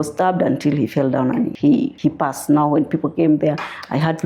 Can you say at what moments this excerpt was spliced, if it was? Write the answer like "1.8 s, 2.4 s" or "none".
1.7 s